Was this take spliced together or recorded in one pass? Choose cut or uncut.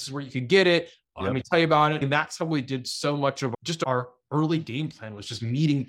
cut